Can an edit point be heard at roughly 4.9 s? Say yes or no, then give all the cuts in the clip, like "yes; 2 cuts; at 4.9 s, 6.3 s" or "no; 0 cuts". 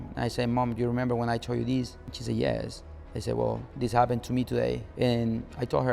yes; 3 cuts; at 2.1 s, 3.7 s, 4.9 s